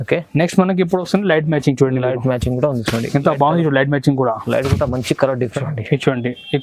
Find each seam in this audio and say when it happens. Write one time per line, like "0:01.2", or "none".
0:05.5